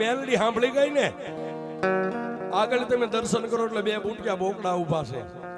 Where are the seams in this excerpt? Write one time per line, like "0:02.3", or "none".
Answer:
none